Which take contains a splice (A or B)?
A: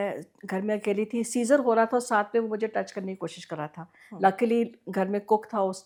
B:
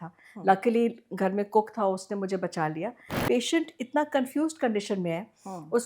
B